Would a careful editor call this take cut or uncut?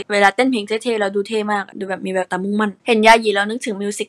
uncut